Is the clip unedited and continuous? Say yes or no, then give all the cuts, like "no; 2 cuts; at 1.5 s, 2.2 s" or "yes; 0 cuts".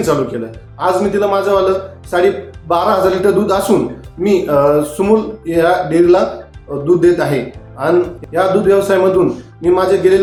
yes; 0 cuts